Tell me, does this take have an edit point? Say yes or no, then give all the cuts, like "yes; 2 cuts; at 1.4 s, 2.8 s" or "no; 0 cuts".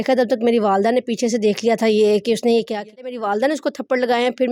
yes; 1 cut; at 3.2 s